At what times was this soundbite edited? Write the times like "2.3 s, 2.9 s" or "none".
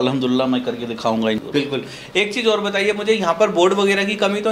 1.4 s